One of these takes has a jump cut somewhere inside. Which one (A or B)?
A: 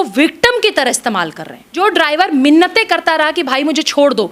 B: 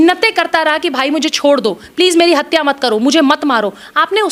A